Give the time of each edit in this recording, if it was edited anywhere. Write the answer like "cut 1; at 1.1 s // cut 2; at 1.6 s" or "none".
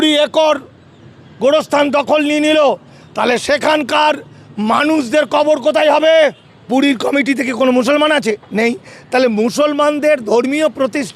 cut 1; at 6.5 s